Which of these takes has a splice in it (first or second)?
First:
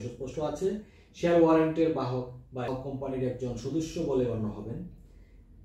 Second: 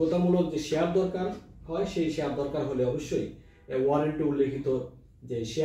first